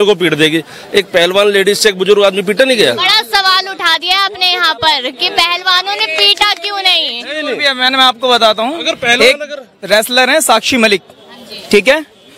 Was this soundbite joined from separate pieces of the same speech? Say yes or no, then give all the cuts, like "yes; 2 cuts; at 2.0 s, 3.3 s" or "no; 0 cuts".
no; 0 cuts